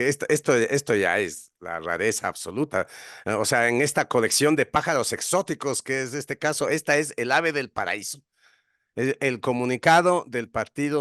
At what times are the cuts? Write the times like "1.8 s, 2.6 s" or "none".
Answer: none